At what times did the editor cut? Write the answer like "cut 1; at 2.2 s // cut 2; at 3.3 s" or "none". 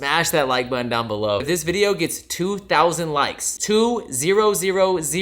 cut 1; at 1.4 s